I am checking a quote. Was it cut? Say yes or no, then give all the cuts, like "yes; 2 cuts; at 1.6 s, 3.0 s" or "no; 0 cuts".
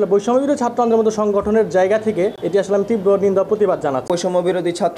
yes; 2 cuts; at 2.4 s, 4.0 s